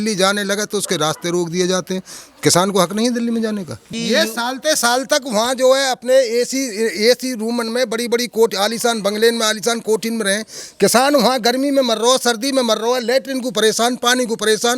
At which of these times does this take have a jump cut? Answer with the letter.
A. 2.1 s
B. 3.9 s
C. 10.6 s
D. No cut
B